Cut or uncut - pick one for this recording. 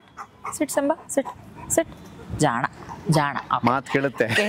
uncut